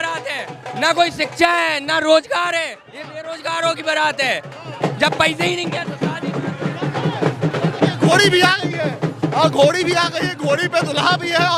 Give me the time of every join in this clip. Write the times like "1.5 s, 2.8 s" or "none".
none